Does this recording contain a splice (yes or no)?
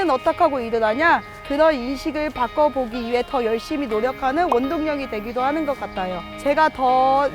yes